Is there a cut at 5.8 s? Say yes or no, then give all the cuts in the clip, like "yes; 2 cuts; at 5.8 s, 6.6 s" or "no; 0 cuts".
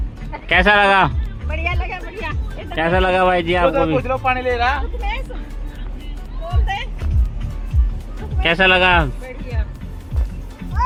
no; 0 cuts